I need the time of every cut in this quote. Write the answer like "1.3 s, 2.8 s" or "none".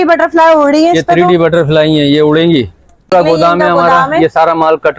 3.1 s